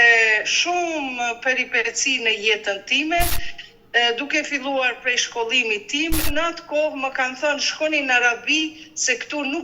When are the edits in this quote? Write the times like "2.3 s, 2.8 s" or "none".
6.3 s